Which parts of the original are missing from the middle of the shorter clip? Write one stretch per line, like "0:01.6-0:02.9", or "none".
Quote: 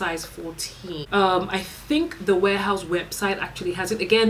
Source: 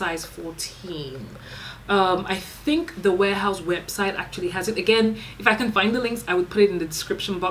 0:01.0-0:01.8